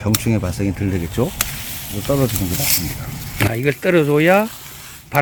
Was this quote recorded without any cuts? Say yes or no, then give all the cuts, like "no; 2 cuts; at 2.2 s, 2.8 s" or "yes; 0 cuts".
yes; 0 cuts